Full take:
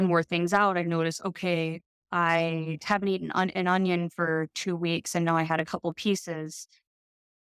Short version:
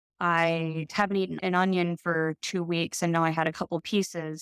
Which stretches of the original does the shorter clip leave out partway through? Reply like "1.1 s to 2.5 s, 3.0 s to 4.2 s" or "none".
3.3 s to 3.5 s